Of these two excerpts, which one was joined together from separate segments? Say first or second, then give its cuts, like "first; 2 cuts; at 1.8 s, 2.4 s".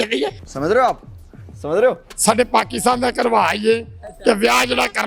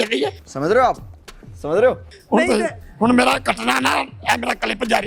first; 1 cut; at 2.1 s